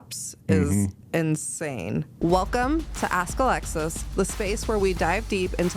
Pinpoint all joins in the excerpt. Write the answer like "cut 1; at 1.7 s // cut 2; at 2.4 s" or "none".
cut 1; at 2.1 s

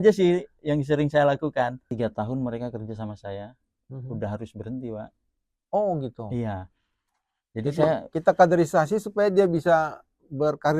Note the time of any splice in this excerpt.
cut 1; at 1.8 s

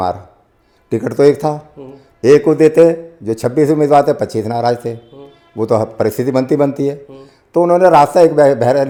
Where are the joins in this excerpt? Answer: none

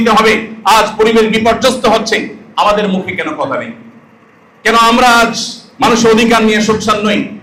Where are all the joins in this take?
none

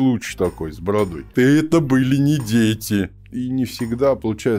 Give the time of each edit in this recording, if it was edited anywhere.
cut 1; at 1.3 s // cut 2; at 3.2 s

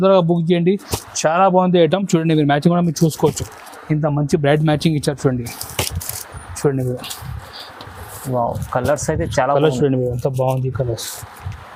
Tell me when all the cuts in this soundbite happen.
none

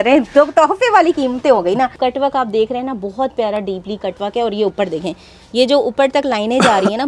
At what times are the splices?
cut 1; at 2.0 s

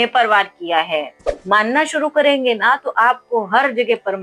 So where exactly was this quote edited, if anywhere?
cut 1; at 1.3 s

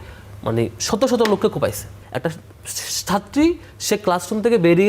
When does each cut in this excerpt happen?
cut 1; at 2.0 s

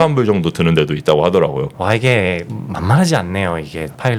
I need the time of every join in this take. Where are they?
cut 1; at 1.7 s

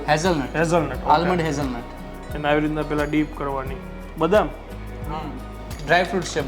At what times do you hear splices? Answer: none

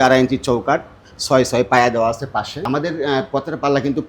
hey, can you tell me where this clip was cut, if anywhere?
cut 1; at 2.6 s

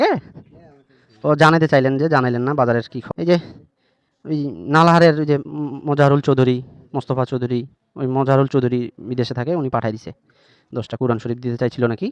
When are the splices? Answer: cut 1; at 3.0 s

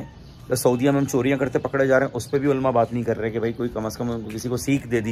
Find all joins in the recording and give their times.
none

